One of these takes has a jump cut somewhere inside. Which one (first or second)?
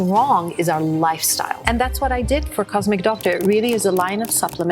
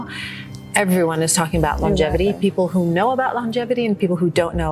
first